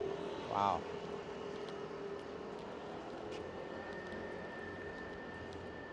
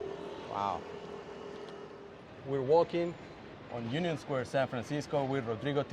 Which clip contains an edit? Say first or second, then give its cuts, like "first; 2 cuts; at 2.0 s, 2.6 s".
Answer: second; 1 cut; at 2.1 s